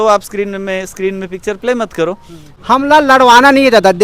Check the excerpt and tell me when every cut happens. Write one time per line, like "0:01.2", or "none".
0:02.5